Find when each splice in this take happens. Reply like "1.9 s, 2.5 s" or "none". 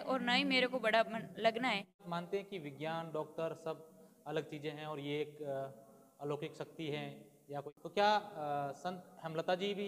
2.1 s, 7.6 s